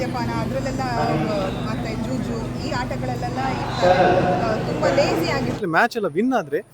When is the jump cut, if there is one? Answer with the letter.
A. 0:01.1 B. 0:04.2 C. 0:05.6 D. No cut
C